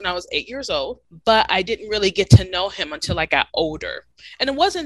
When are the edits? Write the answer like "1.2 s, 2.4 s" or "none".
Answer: 1.1 s